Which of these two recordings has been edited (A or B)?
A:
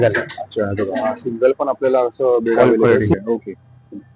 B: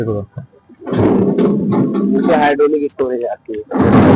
A